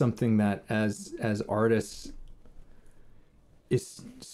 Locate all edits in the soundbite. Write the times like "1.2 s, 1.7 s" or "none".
3.4 s